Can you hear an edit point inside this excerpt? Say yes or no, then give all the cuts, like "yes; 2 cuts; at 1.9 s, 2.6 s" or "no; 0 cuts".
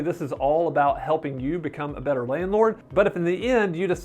yes; 1 cut; at 2.8 s